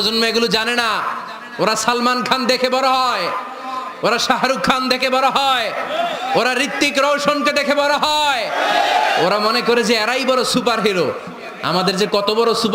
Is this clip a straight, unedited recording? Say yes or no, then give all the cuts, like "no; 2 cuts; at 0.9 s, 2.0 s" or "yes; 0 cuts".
yes; 0 cuts